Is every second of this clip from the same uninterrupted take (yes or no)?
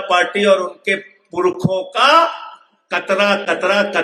yes